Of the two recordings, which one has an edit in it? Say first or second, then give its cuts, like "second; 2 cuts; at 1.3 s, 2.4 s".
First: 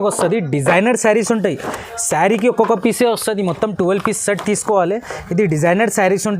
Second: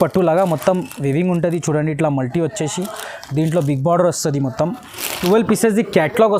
second; 1 cut; at 5.2 s